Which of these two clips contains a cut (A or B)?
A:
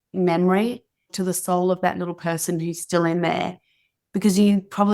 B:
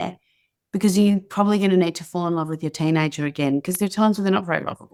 A